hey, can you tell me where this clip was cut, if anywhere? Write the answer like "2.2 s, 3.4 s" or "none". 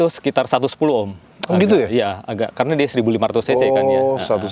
none